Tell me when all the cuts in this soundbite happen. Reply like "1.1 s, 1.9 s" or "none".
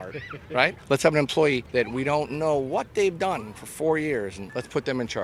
none